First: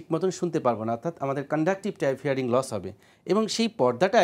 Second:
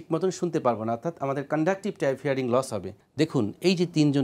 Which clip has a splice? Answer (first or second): second